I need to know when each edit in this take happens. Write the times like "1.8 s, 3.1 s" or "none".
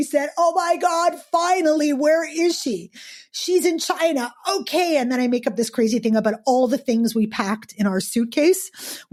none